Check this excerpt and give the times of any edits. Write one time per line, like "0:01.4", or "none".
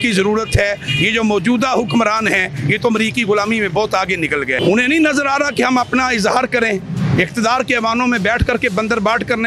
0:04.6